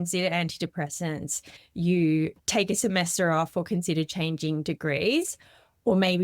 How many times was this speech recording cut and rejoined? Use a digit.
1